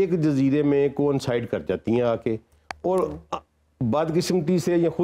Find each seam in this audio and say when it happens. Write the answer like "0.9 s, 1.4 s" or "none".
none

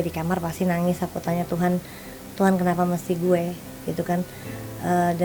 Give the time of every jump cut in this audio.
none

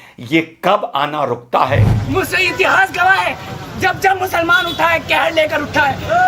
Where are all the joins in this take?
2.0 s

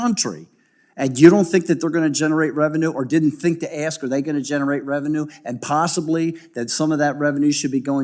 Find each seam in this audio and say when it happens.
none

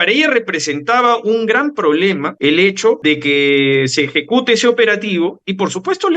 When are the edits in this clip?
2.3 s, 3.0 s

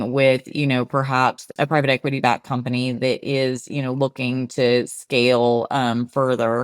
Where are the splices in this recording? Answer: 1.5 s

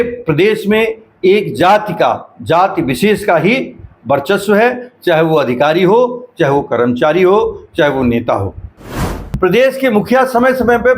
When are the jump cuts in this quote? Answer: 8.9 s

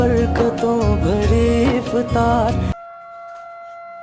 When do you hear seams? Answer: none

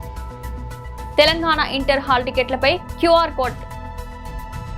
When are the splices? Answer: 0.9 s

